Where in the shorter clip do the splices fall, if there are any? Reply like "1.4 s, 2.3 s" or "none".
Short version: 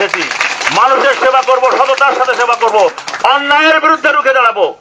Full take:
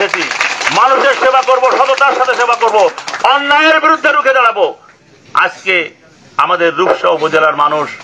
none